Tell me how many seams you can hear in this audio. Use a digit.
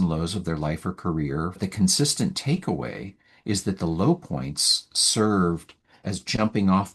1